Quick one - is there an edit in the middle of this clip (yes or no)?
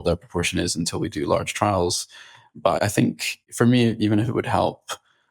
yes